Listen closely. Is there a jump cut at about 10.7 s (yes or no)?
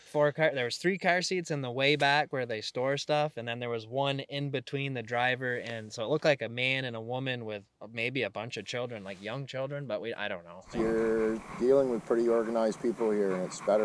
yes